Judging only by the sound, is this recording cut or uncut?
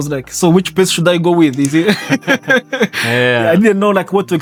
uncut